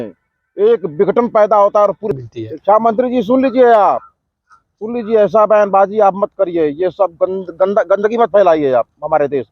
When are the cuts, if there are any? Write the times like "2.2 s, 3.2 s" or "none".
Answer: 2.1 s